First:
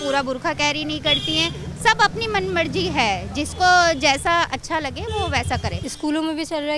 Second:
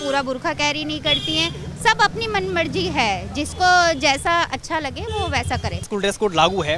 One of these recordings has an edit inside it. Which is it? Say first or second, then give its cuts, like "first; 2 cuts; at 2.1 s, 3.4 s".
first; 1 cut; at 5.8 s